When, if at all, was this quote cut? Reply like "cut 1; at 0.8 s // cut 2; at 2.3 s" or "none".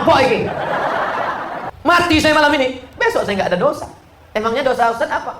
cut 1; at 1.7 s